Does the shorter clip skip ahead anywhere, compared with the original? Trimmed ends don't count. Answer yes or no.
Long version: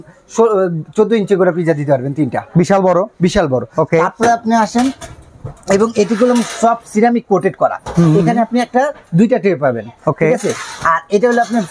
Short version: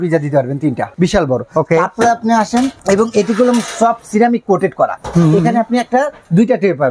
yes